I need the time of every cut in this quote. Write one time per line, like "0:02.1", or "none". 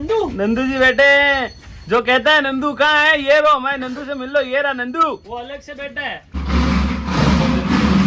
0:06.3